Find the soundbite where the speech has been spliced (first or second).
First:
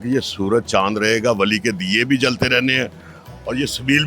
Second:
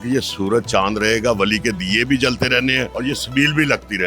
second